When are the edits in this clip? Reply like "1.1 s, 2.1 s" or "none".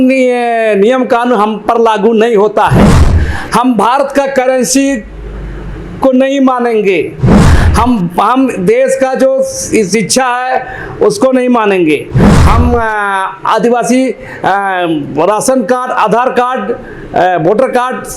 none

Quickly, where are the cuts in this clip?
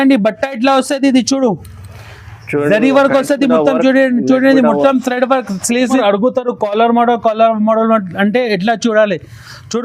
6.0 s

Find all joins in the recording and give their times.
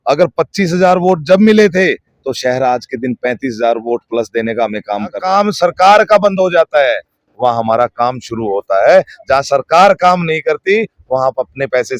5.2 s

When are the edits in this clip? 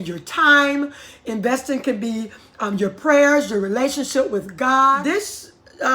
5.0 s

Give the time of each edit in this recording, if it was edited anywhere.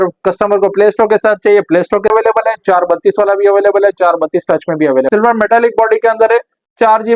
2.1 s, 5.1 s

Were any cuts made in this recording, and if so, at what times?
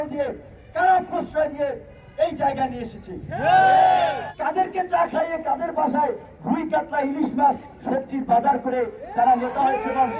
4.3 s

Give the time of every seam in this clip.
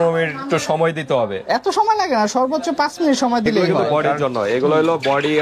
3.6 s

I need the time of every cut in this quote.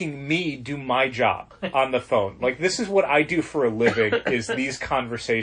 1.5 s

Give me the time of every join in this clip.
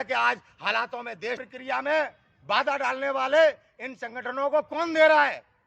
1.4 s

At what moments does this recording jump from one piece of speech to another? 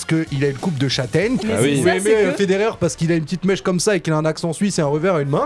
1.4 s

